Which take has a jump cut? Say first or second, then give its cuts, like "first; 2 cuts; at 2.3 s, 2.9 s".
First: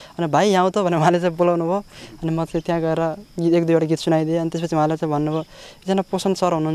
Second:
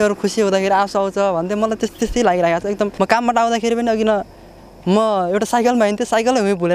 second; 1 cut; at 2.9 s